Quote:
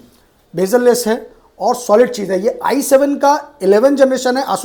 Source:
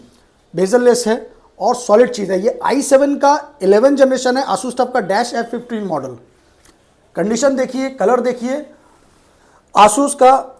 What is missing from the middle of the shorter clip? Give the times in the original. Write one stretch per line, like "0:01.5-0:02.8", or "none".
none